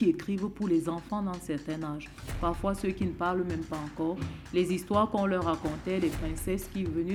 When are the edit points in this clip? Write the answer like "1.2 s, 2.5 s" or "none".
none